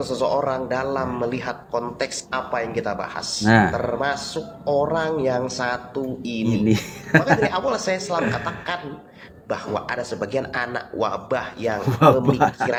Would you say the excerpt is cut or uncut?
uncut